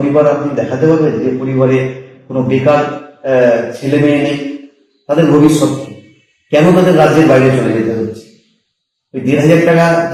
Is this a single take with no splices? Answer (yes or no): yes